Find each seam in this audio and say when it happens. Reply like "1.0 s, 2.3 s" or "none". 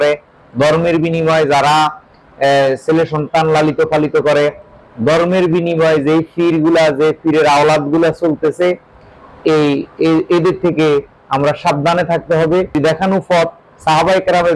12.8 s